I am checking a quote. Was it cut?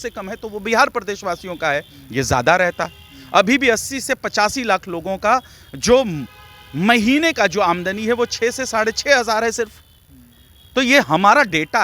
no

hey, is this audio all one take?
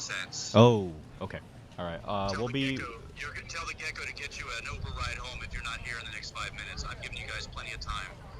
yes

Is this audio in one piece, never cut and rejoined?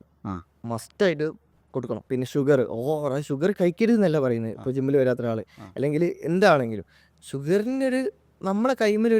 no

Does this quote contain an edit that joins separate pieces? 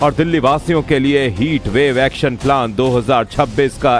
no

